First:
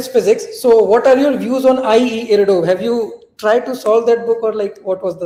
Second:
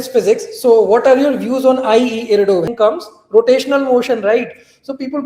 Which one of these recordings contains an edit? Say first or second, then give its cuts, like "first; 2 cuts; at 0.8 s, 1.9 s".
second; 1 cut; at 2.7 s